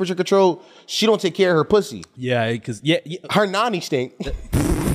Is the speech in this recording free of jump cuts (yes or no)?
yes